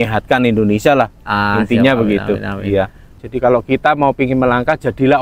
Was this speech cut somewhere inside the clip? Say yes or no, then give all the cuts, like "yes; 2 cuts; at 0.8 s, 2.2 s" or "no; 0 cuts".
yes; 1 cut; at 3.1 s